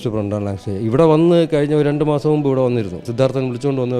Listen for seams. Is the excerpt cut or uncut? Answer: cut